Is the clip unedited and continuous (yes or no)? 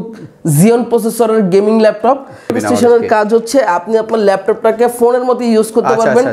no